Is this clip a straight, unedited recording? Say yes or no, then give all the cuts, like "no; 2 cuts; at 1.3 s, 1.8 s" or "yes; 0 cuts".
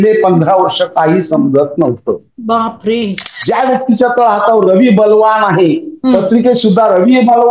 no; 1 cut; at 3.3 s